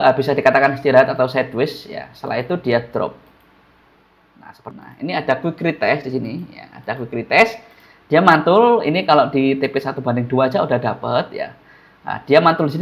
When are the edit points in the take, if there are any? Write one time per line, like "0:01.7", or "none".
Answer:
0:04.7